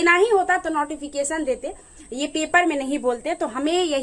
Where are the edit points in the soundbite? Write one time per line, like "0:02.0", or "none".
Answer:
none